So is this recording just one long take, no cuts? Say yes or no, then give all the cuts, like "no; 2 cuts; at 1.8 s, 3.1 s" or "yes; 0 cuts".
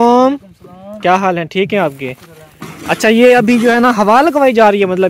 yes; 0 cuts